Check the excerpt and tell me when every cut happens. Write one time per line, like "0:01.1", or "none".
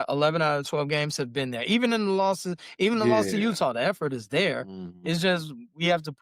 none